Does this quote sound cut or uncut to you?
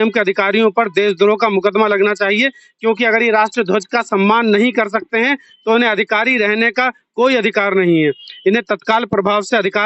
uncut